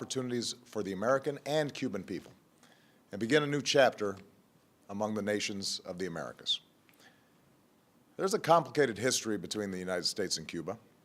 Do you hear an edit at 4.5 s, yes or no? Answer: no